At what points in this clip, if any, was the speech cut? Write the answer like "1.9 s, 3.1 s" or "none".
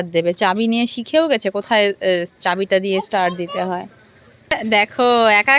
4.6 s